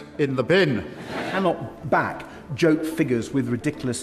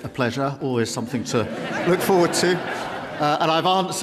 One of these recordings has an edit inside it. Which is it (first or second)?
first